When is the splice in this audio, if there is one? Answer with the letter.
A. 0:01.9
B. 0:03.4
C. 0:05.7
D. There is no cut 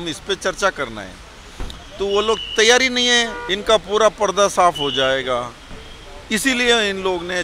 B